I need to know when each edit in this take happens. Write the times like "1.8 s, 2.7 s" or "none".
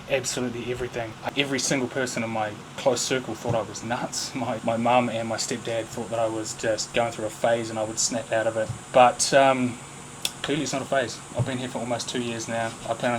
1.2 s, 4.6 s